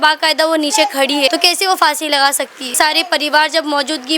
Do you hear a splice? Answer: yes; 2 cuts; at 1.3 s, 2.7 s

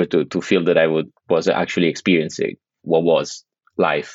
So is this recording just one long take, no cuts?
no; 1 cut; at 2.7 s

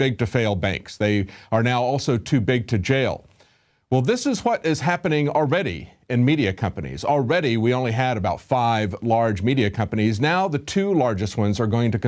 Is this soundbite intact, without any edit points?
no; 1 cut; at 10.3 s

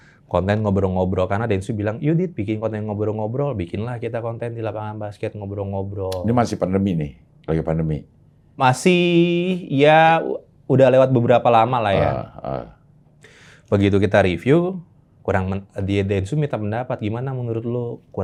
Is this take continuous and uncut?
yes; 0 cuts

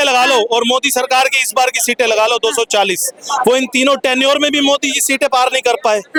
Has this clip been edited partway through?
no; 0 cuts

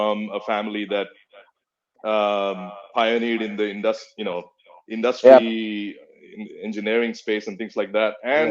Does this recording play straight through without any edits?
yes; 0 cuts

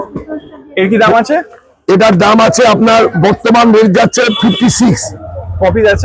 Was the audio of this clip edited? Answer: no; 0 cuts

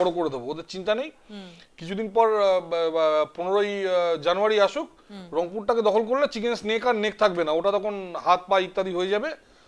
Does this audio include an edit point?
no; 0 cuts

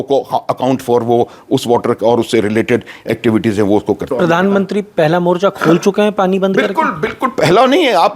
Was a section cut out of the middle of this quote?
yes; 1 cut; at 4.1 s

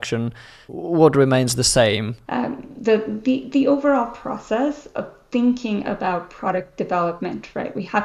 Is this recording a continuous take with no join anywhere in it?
no; 1 cut; at 2.1 s

